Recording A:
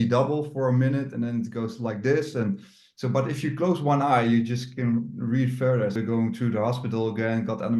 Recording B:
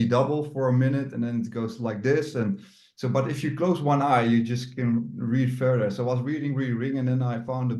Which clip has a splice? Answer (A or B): A